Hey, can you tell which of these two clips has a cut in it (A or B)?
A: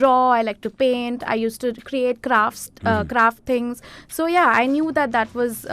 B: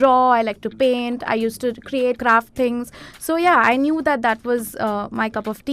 B